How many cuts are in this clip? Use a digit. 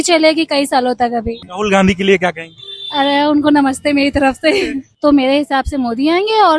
2